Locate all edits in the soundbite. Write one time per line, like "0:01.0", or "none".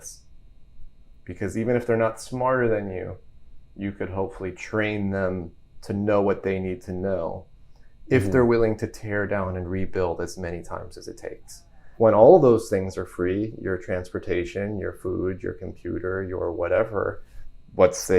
0:11.9